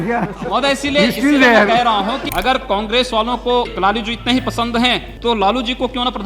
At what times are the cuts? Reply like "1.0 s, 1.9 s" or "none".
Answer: 2.3 s, 3.7 s, 5.1 s

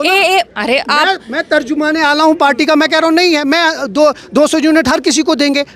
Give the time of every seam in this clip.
none

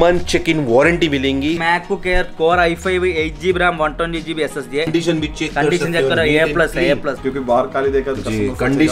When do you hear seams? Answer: 1.6 s, 4.9 s, 7.2 s

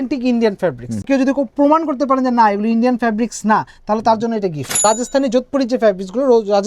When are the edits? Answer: 1.1 s, 4.7 s

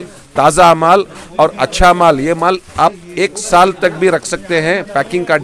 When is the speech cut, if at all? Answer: none

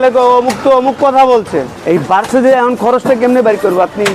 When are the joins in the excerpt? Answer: 1.7 s

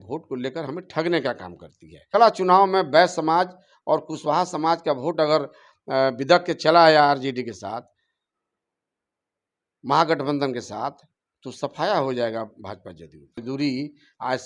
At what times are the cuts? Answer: 2.1 s, 13.4 s

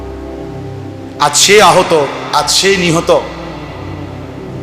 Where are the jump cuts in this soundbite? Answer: 1.0 s

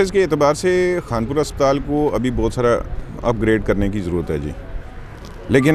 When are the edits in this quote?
none

